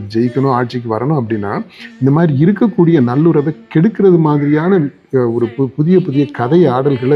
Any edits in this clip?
no; 0 cuts

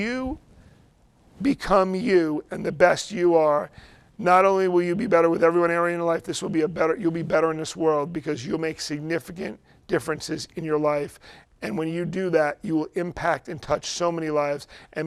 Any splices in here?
no; 0 cuts

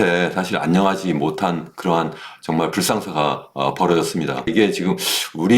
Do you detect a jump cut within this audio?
yes; 1 cut; at 4.5 s

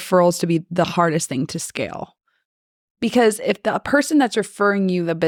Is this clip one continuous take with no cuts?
yes; 0 cuts

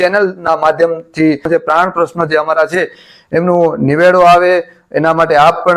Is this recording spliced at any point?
yes; 1 cut; at 1.4 s

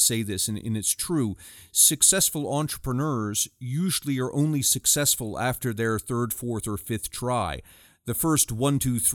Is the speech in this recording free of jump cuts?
yes; 0 cuts

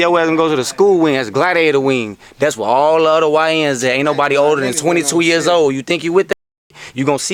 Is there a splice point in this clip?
no; 0 cuts

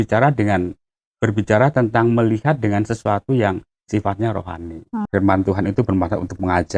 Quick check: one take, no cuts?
no; 1 cut; at 5.0 s

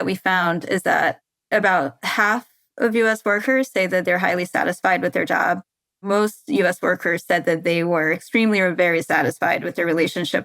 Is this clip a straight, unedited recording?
no; 2 cuts; at 1.3 s, 6.1 s

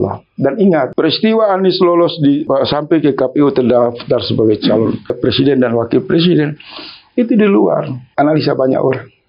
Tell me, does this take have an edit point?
yes; 4 cuts; at 0.9 s, 2.5 s, 5.2 s, 8.0 s

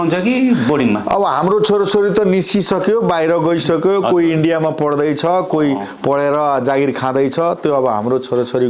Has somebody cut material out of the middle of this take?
no; 0 cuts

